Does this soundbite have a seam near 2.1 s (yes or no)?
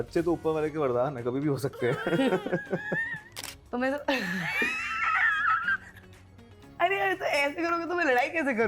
no